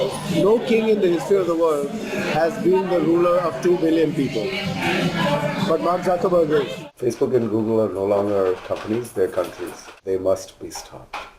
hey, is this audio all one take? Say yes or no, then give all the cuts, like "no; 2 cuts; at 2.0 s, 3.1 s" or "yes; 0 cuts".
no; 2 cuts; at 6.9 s, 9.9 s